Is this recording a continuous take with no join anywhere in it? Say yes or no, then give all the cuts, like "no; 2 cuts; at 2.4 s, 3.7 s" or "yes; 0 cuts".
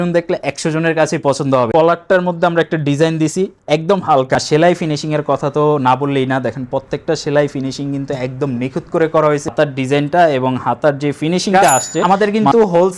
no; 4 cuts; at 1.7 s, 4.4 s, 9.5 s, 12.0 s